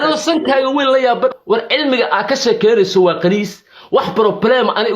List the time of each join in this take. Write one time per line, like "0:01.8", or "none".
0:01.4